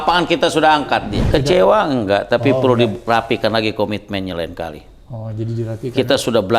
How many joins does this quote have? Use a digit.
1